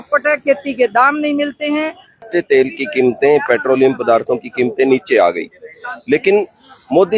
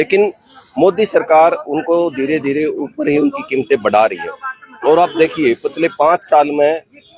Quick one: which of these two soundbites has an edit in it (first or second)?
first